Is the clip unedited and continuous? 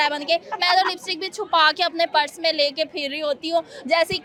yes; 0 cuts

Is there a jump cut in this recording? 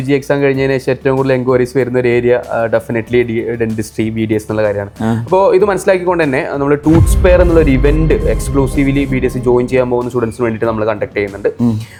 no; 0 cuts

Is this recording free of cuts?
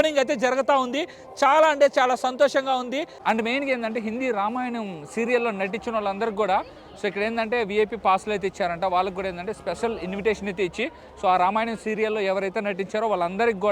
yes; 0 cuts

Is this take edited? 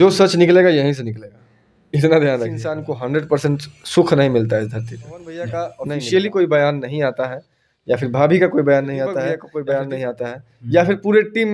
yes; 3 cuts; at 2.9 s, 5.6 s, 9.4 s

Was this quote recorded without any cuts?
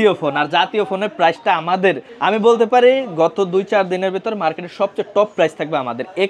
no; 1 cut; at 2.1 s

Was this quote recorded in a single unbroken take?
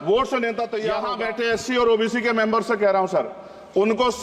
no; 1 cut; at 1.1 s

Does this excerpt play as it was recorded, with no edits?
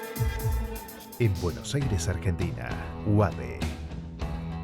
no; 1 cut; at 0.9 s

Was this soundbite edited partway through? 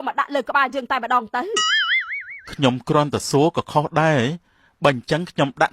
no; 0 cuts

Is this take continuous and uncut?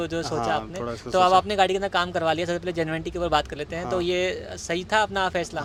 yes; 0 cuts

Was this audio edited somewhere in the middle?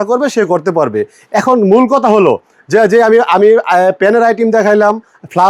no; 0 cuts

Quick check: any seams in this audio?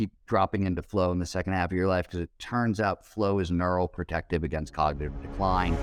no; 0 cuts

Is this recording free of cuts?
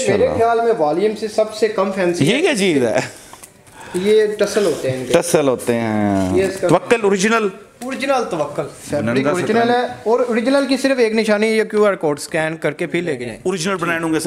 no; 2 cuts; at 8.8 s, 13.3 s

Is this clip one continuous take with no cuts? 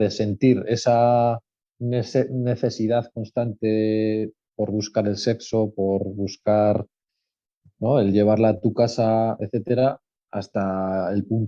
yes; 0 cuts

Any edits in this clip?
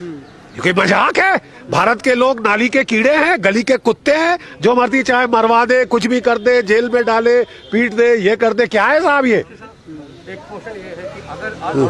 no; 0 cuts

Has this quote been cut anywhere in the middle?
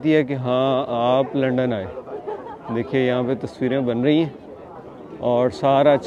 no; 0 cuts

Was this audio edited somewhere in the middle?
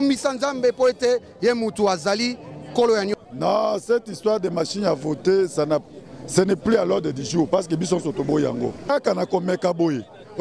yes; 2 cuts; at 3.1 s, 8.9 s

